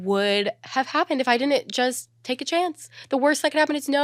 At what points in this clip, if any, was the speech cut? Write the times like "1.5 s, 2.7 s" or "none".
none